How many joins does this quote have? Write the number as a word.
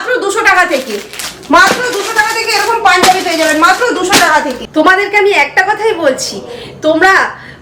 one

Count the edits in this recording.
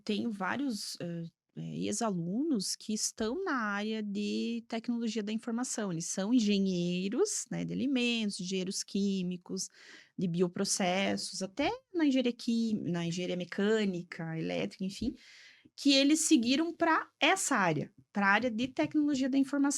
zero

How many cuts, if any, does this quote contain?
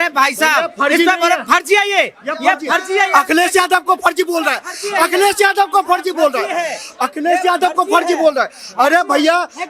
zero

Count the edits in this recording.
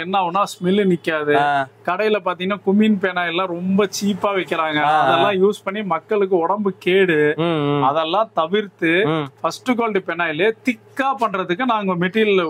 zero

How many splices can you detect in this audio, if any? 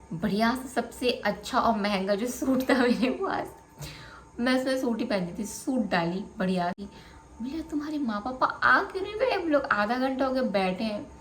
one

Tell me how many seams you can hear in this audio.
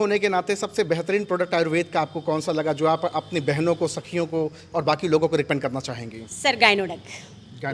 zero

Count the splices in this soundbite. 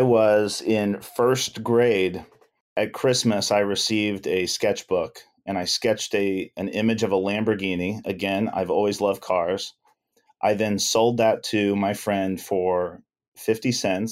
one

